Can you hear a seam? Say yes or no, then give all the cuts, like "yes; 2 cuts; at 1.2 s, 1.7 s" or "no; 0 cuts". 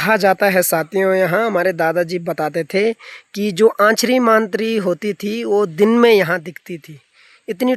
no; 0 cuts